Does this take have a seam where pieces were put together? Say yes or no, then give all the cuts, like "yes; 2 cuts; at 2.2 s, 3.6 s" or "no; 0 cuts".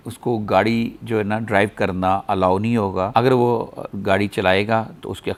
no; 0 cuts